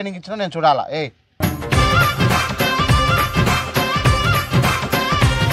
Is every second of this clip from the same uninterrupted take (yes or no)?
no